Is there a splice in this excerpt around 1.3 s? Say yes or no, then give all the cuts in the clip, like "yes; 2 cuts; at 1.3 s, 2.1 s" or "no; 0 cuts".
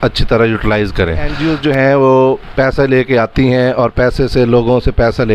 yes; 1 cut; at 1.3 s